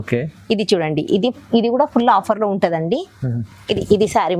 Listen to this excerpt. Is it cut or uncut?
uncut